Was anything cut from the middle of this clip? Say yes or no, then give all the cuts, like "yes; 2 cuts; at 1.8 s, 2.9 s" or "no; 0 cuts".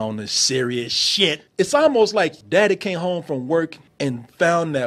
yes; 3 cuts; at 1.4 s, 2.4 s, 3.8 s